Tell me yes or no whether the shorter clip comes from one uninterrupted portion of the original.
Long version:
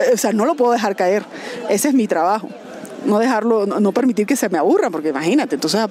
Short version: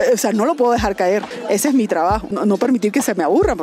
no